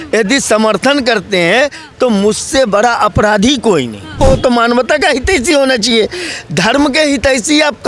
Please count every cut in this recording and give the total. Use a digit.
1